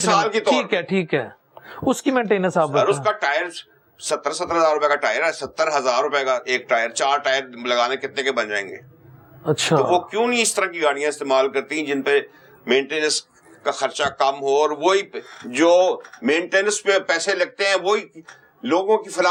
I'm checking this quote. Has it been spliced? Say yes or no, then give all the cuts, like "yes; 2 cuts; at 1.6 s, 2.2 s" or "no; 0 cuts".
no; 0 cuts